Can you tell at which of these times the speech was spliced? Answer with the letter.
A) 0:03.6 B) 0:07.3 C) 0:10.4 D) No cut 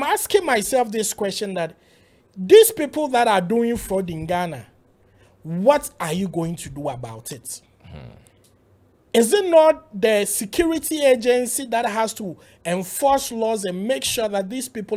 D